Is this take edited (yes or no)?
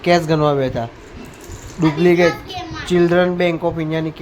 no